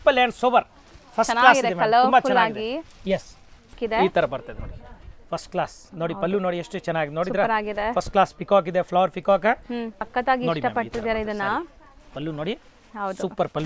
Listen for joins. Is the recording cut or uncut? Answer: cut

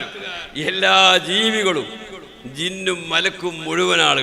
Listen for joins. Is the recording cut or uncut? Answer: uncut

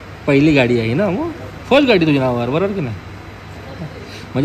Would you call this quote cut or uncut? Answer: uncut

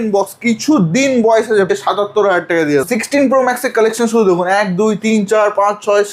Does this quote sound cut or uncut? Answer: cut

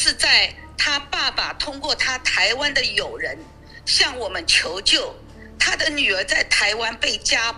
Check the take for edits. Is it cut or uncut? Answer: uncut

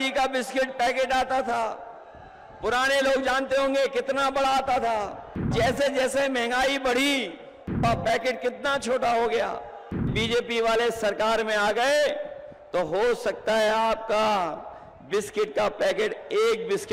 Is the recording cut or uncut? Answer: cut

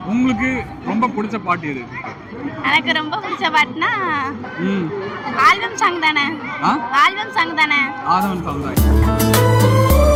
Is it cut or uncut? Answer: uncut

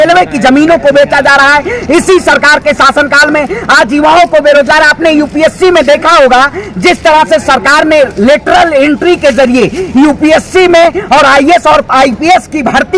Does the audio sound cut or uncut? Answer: uncut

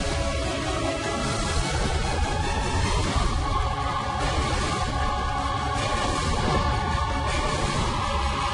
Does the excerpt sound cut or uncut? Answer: uncut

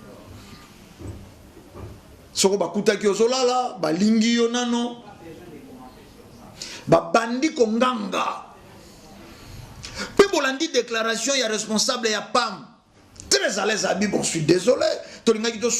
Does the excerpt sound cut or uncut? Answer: cut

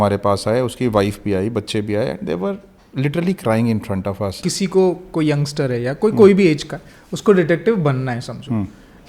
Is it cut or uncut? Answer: cut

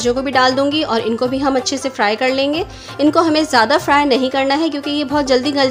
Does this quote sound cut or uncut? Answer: uncut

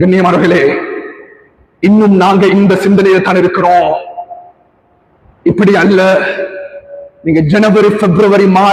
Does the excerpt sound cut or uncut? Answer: uncut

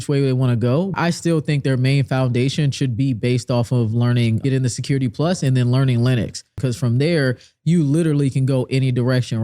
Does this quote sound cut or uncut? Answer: cut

